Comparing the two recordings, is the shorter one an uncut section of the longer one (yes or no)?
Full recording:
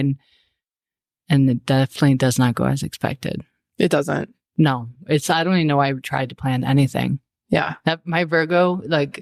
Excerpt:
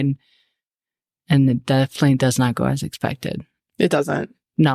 yes